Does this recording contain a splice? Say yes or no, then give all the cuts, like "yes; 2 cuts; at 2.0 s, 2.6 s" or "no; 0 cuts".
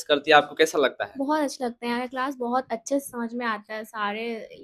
no; 0 cuts